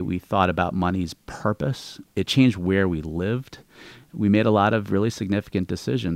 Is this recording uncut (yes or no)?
no